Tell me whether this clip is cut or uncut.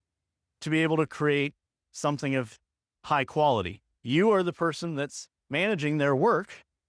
cut